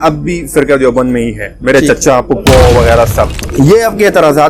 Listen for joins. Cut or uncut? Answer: cut